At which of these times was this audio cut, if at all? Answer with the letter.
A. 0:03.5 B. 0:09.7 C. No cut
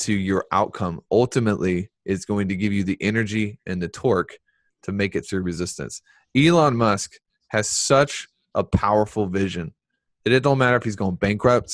C